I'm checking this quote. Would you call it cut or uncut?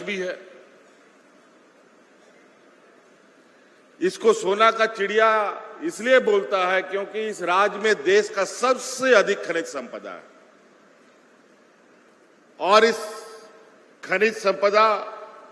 cut